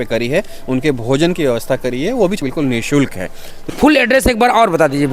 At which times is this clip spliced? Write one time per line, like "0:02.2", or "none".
0:02.4
0:03.6